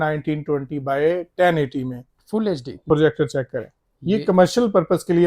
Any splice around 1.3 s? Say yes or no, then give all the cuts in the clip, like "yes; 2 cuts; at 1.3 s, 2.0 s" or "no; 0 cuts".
no; 1 cut; at 2.9 s